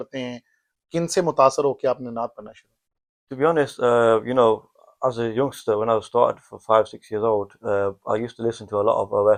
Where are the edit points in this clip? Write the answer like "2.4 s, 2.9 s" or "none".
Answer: none

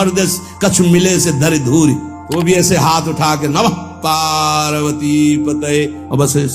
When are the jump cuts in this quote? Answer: 2.2 s

